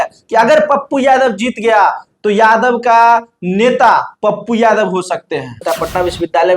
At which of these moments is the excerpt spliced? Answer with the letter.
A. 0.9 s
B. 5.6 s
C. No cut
B